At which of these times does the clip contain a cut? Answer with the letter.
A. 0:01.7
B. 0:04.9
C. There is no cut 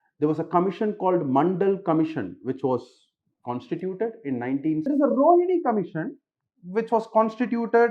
B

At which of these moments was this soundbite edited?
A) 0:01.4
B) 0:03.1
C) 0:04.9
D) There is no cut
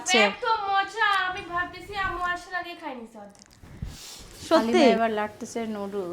C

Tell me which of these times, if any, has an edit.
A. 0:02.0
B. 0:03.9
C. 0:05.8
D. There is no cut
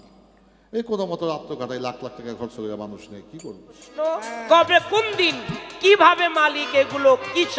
B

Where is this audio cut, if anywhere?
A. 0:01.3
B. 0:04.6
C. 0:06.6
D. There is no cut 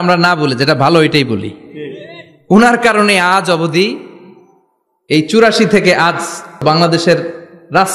C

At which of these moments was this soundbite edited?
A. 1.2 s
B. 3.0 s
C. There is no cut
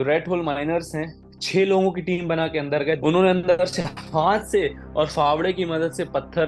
B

